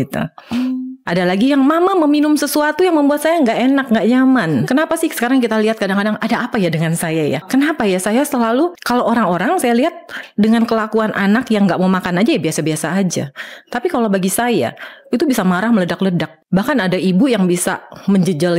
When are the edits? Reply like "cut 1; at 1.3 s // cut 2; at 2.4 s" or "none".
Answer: cut 1; at 4.6 s // cut 2; at 7.5 s // cut 3; at 8.8 s // cut 4; at 16.3 s